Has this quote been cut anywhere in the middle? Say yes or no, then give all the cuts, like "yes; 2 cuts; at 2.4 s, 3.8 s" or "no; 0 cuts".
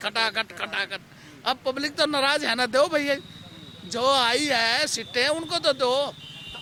no; 0 cuts